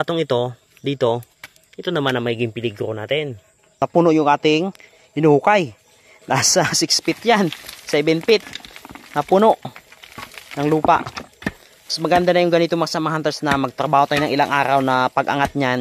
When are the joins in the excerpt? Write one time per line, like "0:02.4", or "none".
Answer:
0:03.8